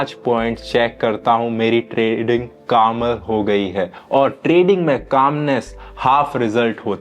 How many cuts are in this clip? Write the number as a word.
zero